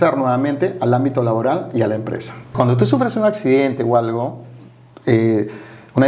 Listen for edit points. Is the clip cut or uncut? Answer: cut